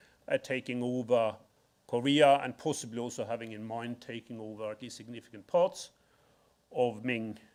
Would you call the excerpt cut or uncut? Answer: uncut